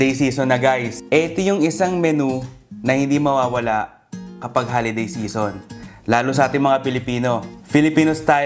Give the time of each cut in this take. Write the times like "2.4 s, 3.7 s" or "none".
0.9 s, 7.5 s